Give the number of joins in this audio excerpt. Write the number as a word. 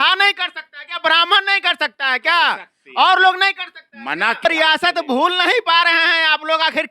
one